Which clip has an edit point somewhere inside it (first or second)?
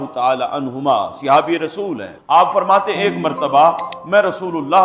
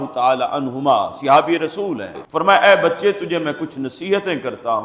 second